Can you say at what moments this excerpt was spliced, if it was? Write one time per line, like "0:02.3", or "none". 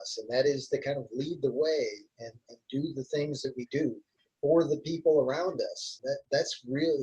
0:05.9